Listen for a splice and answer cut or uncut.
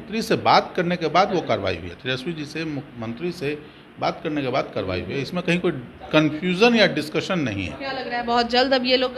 uncut